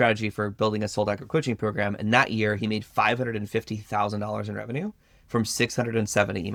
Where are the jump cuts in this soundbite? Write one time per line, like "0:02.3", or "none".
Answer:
none

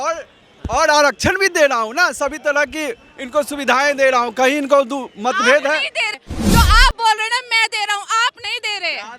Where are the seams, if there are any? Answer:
0:06.2

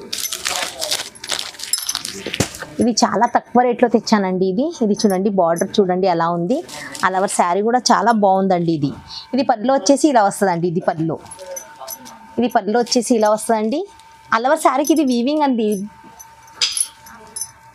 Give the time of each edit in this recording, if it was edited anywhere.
none

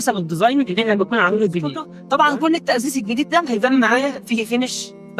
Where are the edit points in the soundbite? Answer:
0:01.9

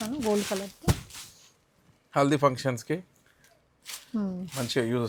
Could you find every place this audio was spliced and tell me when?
none

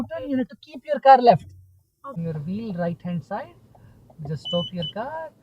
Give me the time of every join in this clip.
0:02.2

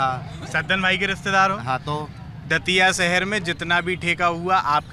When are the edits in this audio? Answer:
none

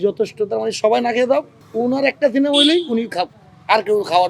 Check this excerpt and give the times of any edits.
0:01.6

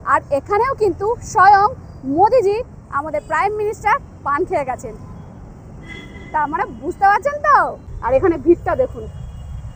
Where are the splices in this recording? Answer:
none

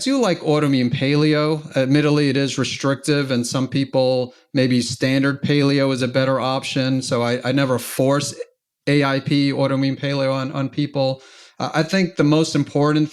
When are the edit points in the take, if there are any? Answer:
none

